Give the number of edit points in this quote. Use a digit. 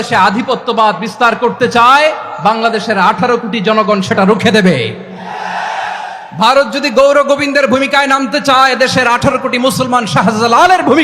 0